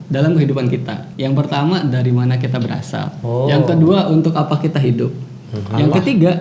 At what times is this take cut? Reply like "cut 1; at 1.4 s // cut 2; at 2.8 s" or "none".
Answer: cut 1; at 1.0 s // cut 2; at 3.2 s